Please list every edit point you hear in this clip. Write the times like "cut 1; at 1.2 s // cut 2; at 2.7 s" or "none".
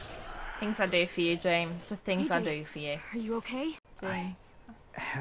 cut 1; at 3.9 s